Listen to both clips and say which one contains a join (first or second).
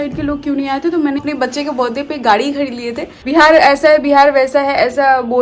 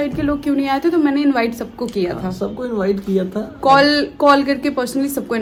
first